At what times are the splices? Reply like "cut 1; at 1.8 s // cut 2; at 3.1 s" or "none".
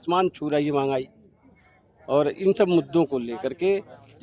none